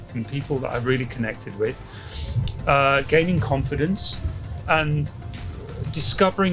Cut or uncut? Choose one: uncut